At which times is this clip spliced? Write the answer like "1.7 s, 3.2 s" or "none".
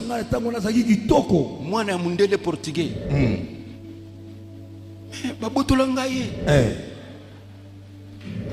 none